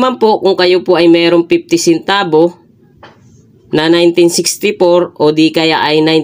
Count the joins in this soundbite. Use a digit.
0